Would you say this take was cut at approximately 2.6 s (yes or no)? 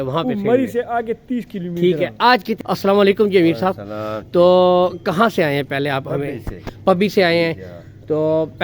yes